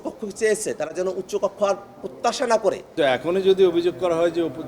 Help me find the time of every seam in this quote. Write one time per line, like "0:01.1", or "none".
0:02.9